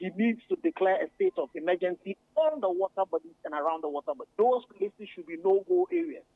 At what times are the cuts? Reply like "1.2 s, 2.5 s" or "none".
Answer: 1.5 s, 4.3 s